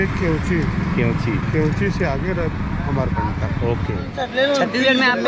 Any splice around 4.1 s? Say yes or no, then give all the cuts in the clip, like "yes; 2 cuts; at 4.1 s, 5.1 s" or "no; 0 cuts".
yes; 1 cut; at 4.1 s